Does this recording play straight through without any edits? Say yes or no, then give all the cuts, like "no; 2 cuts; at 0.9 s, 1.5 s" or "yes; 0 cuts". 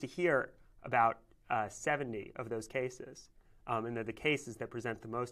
no; 1 cut; at 3.2 s